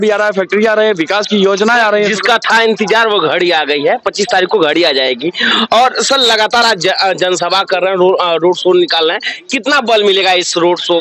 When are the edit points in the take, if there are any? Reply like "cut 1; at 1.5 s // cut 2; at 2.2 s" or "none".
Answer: none